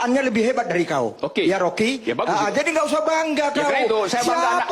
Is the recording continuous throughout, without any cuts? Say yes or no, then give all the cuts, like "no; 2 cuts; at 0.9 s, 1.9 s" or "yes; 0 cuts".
yes; 0 cuts